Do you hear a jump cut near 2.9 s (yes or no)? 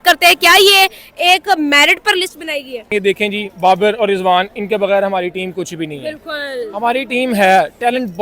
yes